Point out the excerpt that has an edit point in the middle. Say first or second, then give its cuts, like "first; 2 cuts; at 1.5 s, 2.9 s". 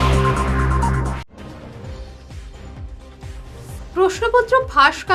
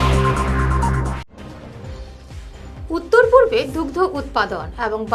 second; 1 cut; at 2.8 s